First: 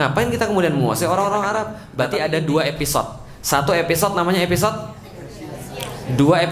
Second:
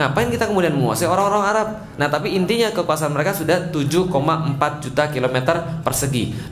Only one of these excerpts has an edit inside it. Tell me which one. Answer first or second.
first